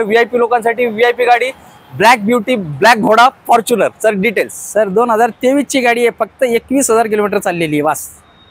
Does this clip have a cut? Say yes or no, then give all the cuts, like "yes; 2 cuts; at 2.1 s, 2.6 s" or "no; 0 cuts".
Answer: no; 0 cuts